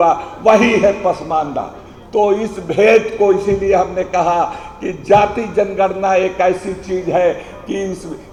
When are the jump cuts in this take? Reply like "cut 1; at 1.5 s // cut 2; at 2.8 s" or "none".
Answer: none